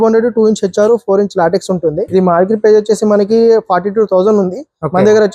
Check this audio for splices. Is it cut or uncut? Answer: cut